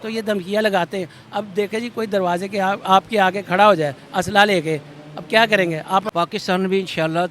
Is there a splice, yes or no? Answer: yes